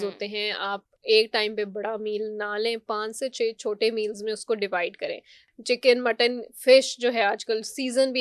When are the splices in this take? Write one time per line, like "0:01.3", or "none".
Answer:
0:05.4

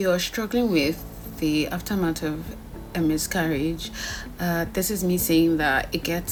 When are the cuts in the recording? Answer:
none

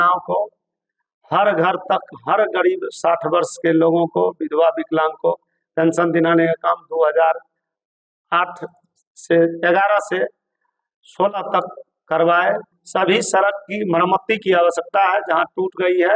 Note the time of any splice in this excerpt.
0:12.7

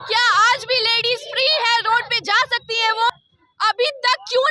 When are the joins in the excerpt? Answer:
0:03.1

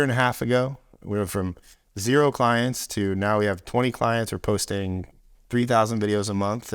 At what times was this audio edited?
none

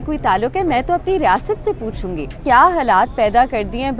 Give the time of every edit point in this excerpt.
0:02.4

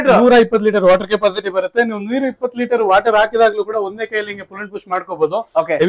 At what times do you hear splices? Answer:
none

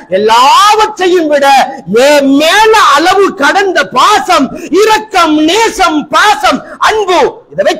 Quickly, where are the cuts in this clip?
none

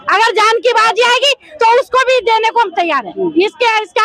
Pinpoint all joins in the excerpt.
none

